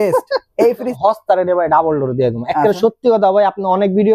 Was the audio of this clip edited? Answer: yes; 1 cut; at 0.9 s

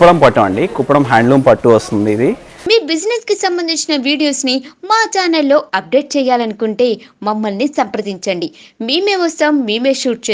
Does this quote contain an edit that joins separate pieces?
yes; 1 cut; at 2.6 s

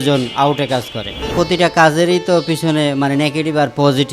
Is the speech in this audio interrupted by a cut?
yes; 1 cut; at 1.3 s

